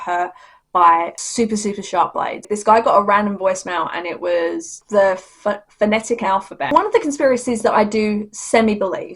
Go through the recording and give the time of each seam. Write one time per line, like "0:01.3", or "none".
0:02.5
0:06.7